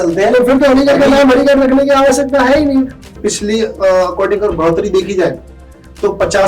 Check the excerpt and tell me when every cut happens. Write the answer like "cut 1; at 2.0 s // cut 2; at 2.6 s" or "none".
cut 1; at 3.0 s